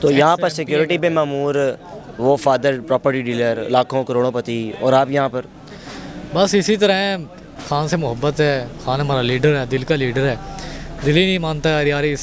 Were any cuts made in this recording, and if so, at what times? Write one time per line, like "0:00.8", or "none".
none